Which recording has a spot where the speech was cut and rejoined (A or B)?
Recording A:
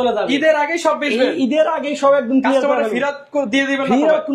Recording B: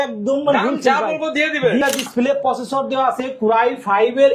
B